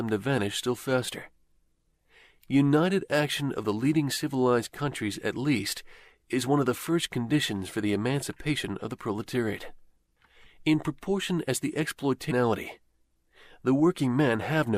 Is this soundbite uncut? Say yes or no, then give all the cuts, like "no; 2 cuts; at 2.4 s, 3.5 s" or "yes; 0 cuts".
yes; 0 cuts